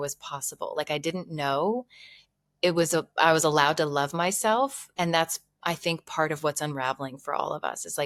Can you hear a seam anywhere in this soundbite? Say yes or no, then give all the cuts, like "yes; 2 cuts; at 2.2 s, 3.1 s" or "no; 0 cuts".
no; 0 cuts